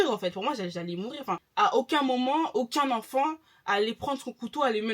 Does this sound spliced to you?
yes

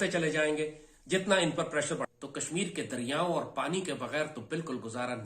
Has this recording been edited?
yes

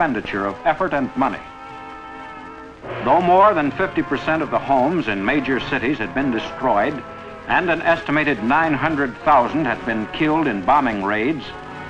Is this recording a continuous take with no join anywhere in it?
yes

